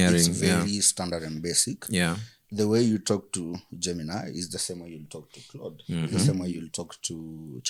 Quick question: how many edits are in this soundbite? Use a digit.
0